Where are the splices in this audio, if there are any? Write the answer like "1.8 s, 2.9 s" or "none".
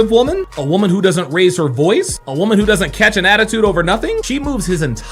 none